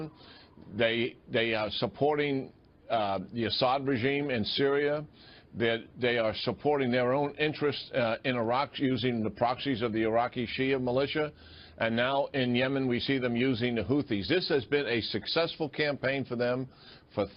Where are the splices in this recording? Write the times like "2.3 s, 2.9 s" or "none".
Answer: none